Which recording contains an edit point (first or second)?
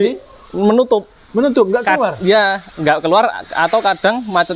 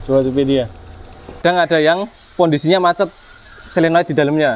second